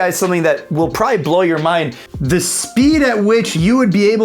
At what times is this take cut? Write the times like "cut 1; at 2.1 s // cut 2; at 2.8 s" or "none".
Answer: cut 1; at 2.0 s